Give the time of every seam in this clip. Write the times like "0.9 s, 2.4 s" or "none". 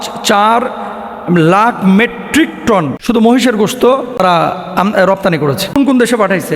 2.9 s, 4.2 s, 5.8 s